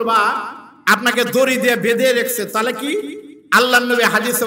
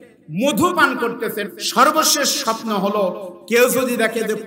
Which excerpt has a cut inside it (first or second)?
second